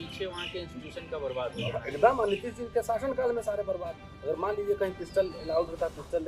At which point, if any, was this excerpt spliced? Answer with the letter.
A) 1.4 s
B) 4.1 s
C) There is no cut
B